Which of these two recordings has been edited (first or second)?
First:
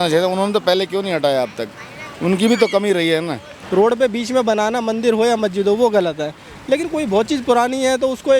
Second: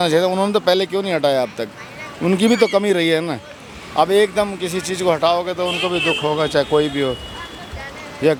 first